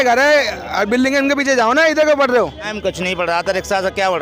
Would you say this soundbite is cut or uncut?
cut